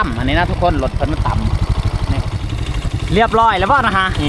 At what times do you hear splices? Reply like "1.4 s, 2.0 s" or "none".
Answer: 2.6 s

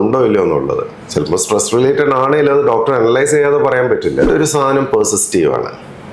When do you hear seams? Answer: 4.3 s

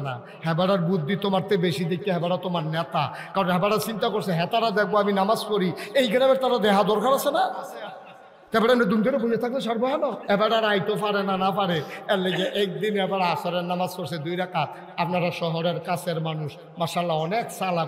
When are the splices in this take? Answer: 10.2 s

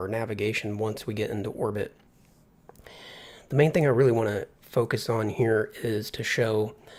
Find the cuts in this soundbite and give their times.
none

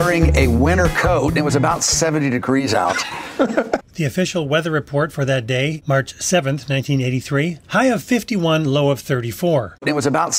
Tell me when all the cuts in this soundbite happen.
none

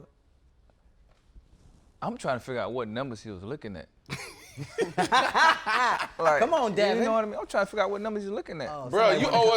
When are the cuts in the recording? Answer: 8.6 s

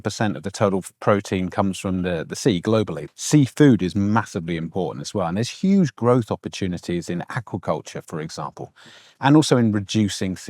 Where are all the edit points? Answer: 3.0 s

